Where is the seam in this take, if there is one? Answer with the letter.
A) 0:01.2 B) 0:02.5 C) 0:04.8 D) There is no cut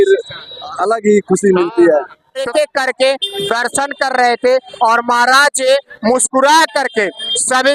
B